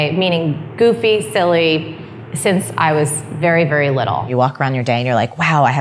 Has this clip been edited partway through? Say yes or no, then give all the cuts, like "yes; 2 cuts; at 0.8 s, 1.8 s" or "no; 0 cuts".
yes; 1 cut; at 4.3 s